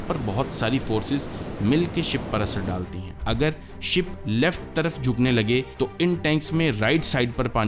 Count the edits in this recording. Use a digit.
1